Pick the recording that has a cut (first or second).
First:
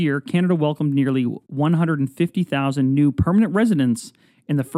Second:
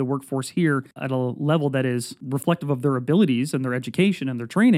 second